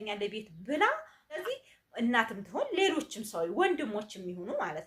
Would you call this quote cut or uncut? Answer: cut